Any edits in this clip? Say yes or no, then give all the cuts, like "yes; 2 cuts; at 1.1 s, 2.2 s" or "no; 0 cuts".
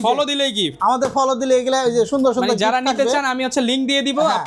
no; 0 cuts